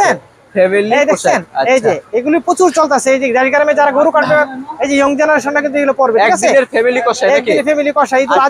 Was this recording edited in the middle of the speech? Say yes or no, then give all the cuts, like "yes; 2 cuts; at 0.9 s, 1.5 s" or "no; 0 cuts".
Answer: no; 0 cuts